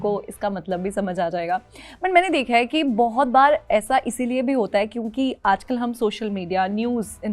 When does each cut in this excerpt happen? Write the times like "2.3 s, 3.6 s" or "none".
none